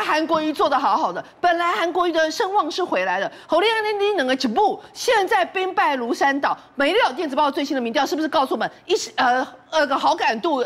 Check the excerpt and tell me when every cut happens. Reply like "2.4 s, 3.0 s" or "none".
none